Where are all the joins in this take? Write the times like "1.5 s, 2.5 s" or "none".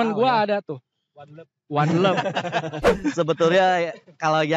2.9 s